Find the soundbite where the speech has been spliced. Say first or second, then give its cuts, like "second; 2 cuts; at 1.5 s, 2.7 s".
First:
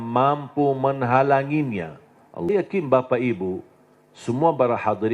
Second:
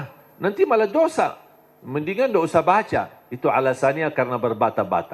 first; 1 cut; at 2.5 s